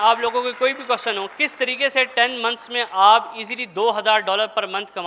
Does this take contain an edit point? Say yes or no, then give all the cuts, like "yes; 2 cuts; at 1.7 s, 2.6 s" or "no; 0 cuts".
no; 0 cuts